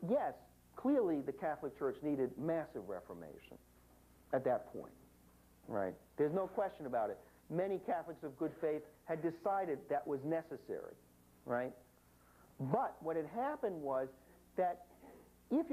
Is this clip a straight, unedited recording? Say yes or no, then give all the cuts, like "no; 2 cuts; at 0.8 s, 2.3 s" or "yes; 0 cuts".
yes; 0 cuts